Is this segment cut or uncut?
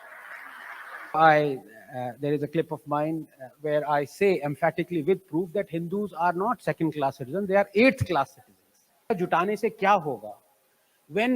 cut